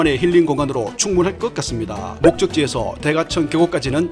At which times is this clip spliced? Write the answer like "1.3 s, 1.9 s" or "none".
2.0 s